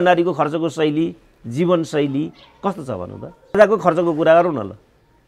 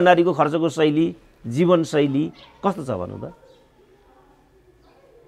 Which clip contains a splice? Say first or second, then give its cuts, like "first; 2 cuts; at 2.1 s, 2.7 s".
first; 1 cut; at 3.6 s